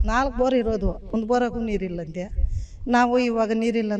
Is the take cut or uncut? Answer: uncut